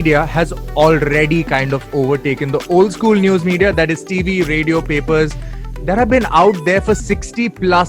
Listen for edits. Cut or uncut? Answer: uncut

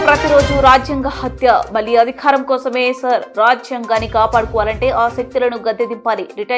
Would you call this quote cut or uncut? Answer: uncut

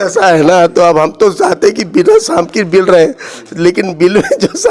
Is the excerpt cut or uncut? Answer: uncut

